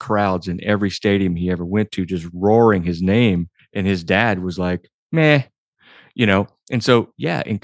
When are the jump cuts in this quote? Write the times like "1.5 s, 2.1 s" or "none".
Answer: 3.6 s